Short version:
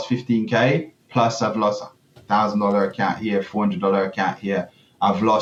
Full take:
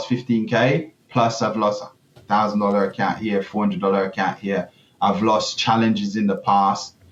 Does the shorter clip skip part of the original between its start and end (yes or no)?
no